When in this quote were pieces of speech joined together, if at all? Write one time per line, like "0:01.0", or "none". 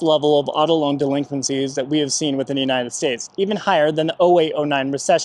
none